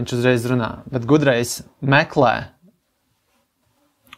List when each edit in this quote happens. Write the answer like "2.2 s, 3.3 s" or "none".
none